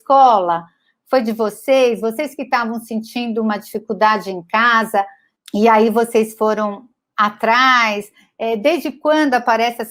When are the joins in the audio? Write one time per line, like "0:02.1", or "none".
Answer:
none